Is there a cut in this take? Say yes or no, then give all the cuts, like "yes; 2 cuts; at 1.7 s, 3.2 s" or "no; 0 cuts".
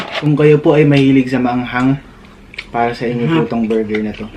no; 0 cuts